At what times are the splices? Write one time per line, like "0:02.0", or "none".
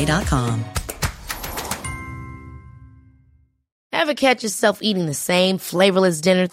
0:03.7

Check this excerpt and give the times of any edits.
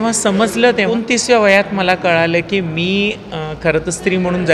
0:00.9

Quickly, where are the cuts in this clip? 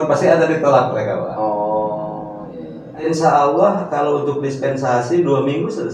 0:03.0

